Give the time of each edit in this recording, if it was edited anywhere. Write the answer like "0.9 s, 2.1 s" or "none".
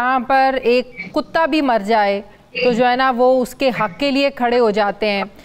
none